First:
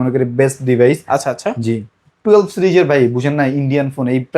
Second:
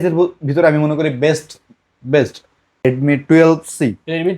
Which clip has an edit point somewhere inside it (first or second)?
second